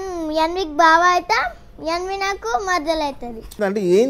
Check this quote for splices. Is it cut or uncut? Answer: uncut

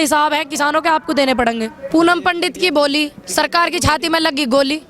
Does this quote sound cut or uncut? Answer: cut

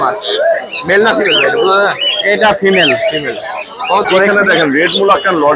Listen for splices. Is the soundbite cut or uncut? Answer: cut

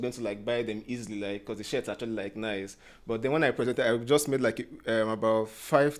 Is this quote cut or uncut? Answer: uncut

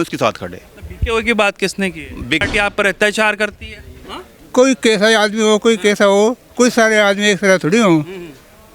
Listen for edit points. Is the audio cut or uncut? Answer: cut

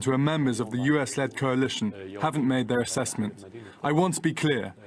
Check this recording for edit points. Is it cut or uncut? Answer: cut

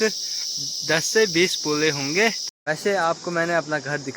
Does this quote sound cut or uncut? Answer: cut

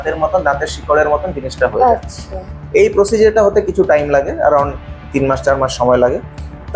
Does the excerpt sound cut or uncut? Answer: uncut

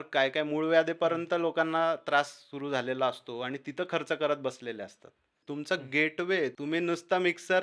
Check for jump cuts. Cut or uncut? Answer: cut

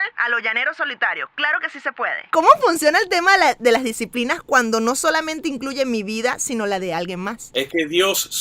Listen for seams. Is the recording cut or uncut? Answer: cut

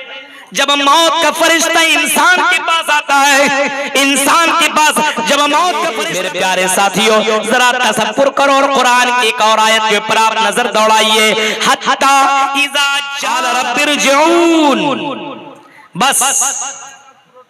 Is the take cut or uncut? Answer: cut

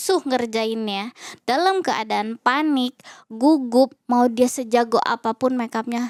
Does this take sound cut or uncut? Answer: uncut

